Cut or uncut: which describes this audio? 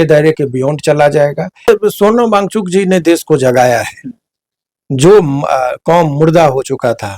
cut